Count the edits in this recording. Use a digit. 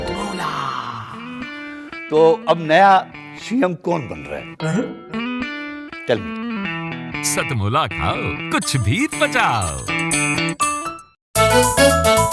1